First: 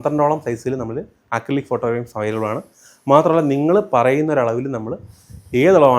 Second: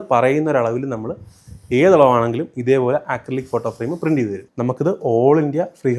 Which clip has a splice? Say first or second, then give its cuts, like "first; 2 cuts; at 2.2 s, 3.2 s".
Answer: second; 1 cut; at 4.4 s